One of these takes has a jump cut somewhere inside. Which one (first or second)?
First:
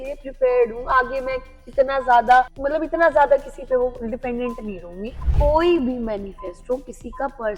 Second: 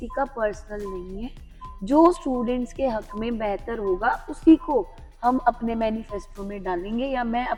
first